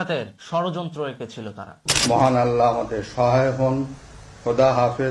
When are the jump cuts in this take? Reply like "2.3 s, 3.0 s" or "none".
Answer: 1.8 s